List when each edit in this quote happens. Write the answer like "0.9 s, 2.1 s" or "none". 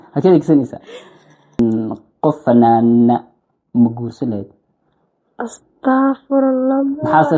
1.6 s